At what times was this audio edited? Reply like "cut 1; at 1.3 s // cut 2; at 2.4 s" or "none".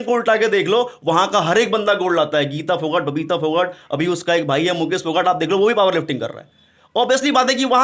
none